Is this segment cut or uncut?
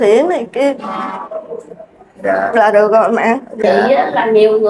cut